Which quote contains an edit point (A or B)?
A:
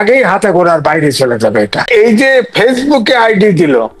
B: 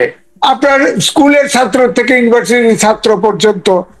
A